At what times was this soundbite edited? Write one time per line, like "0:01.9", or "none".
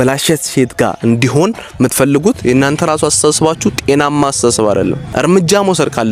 0:05.0